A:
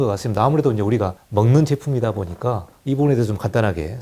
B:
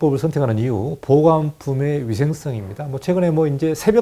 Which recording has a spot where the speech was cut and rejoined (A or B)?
A